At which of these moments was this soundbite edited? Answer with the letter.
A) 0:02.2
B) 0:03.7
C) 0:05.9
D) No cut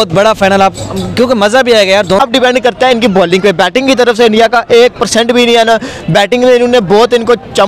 A